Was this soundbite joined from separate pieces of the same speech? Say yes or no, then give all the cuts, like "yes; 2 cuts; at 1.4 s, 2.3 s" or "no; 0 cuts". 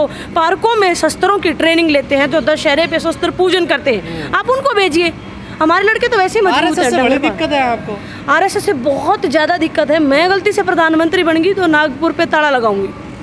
no; 0 cuts